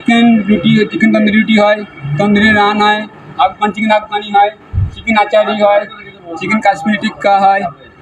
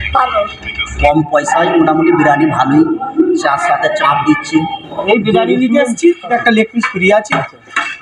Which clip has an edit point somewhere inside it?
second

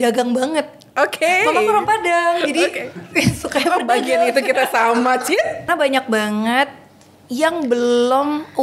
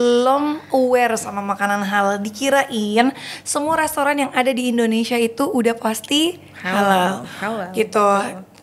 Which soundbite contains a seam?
first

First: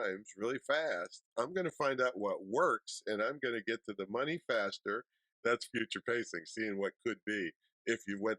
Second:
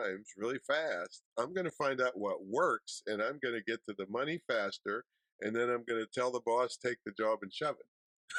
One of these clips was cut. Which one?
first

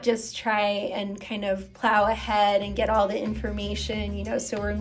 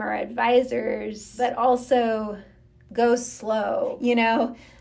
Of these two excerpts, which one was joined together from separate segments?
second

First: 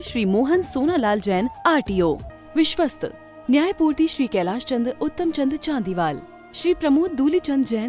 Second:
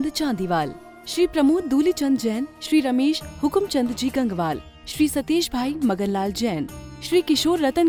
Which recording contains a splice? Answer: first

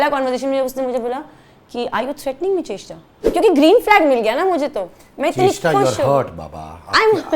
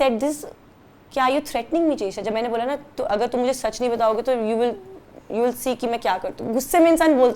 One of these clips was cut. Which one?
first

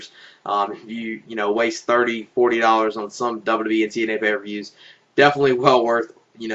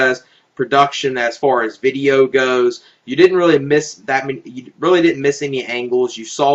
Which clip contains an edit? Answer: first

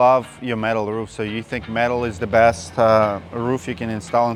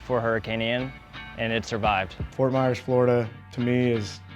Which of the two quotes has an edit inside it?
second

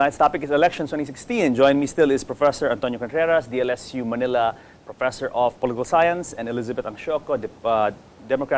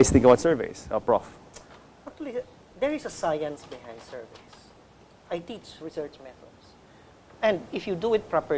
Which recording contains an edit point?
first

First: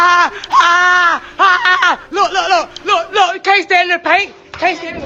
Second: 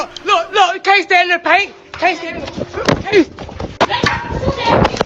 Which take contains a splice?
second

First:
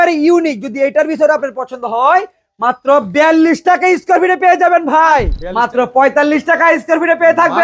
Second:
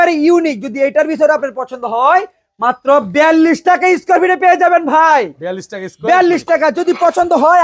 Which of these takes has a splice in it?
first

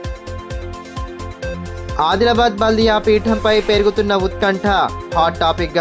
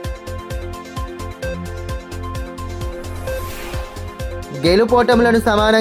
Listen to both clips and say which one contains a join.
first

